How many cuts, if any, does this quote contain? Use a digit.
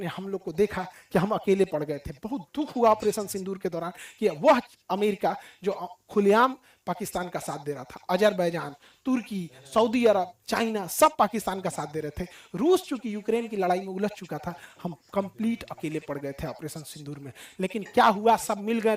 0